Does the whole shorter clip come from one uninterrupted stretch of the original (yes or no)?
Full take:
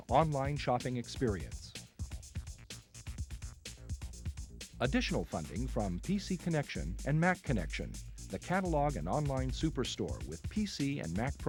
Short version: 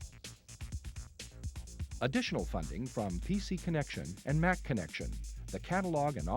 no